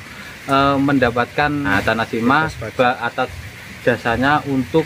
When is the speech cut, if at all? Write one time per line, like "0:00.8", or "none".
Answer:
0:01.7